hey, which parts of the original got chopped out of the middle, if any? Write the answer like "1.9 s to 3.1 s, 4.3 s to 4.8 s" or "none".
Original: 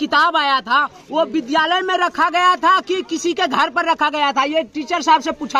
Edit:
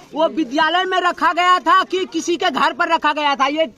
none